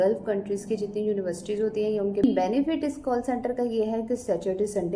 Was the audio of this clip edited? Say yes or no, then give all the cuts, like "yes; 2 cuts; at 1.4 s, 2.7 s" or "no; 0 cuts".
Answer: yes; 1 cut; at 2.2 s